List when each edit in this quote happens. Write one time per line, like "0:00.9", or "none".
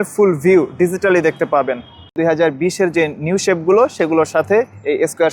0:02.2

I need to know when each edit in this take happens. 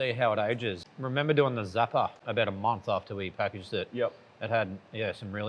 0:00.8
0:02.2

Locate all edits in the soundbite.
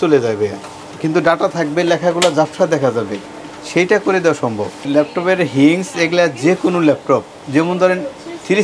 0:04.8

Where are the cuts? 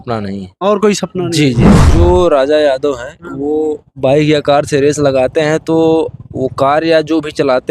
0:01.8

